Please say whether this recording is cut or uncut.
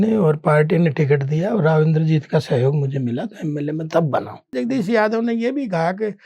cut